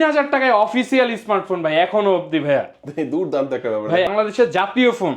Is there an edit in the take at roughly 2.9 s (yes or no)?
no